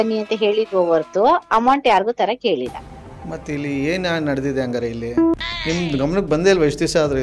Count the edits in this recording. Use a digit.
1